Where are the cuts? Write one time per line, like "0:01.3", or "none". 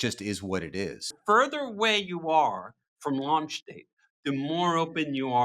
0:01.1